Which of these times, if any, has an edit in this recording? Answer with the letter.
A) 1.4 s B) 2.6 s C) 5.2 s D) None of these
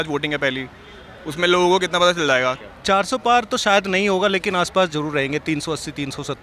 B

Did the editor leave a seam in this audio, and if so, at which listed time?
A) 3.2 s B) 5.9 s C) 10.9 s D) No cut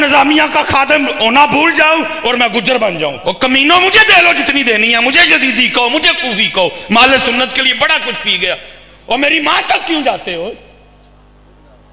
A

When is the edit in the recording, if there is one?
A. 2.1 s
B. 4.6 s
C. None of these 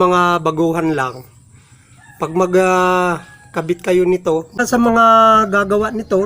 B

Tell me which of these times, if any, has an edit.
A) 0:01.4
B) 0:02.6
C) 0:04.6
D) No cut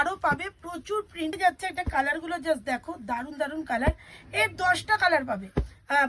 A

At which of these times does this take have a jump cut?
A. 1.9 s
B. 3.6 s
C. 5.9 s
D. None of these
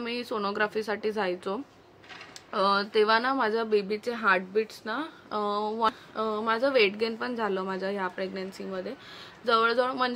C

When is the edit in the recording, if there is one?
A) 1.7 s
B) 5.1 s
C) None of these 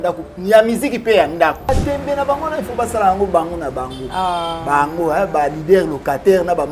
A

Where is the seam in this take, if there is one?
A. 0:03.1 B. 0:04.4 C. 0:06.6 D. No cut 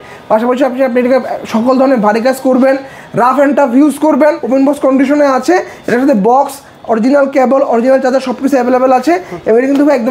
B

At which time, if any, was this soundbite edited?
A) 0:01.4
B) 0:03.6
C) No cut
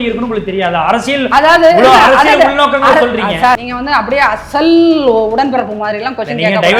B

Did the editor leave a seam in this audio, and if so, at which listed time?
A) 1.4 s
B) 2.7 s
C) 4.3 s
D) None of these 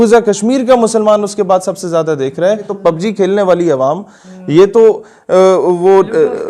B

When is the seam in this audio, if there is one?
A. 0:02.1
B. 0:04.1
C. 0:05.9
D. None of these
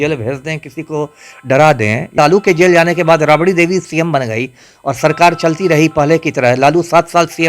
A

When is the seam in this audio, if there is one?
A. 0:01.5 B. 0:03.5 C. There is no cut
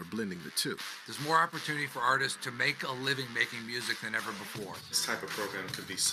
C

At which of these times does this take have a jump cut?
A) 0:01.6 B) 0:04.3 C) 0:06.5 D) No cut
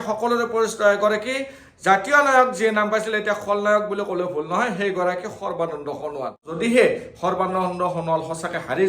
C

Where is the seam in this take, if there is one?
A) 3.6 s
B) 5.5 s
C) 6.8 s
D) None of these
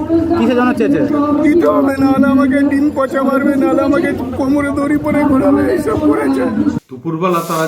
C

